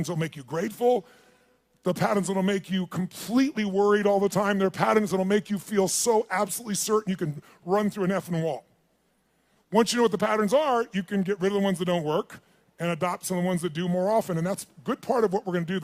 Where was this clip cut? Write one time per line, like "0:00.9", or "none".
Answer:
0:06.2